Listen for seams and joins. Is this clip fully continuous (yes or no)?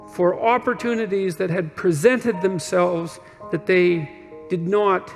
yes